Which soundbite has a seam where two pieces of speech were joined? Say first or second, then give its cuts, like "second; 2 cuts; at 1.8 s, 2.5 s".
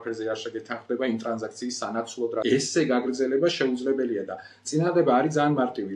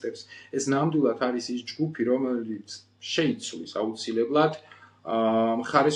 first; 1 cut; at 2.4 s